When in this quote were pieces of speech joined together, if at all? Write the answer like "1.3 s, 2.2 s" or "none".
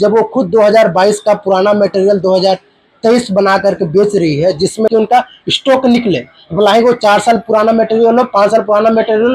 4.9 s

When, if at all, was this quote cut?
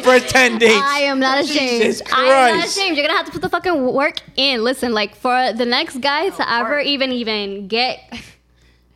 none

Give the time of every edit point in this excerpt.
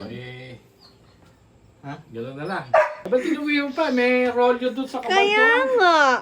3.0 s

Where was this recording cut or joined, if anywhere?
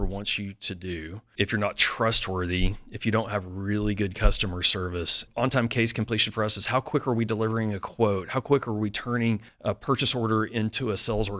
1.2 s, 5.2 s, 9.5 s

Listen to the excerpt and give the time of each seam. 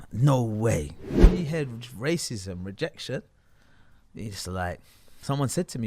1.2 s

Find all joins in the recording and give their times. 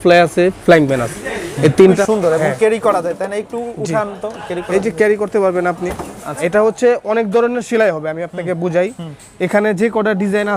2.0 s, 6.5 s

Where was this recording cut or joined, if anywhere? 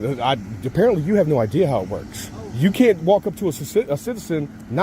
none

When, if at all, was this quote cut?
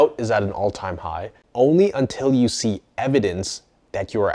1.4 s

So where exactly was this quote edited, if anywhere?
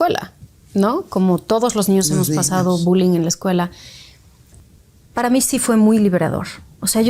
4.6 s

